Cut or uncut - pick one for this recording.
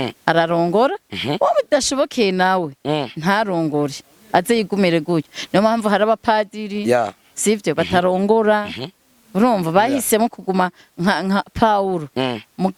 uncut